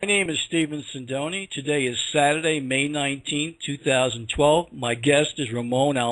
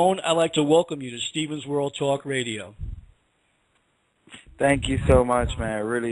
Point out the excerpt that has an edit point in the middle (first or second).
second